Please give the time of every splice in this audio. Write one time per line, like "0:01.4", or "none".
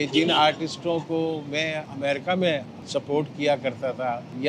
0:01.9